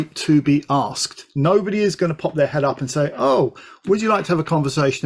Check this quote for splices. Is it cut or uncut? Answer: uncut